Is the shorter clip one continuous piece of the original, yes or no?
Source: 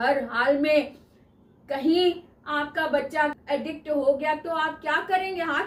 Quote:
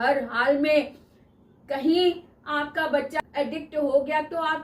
no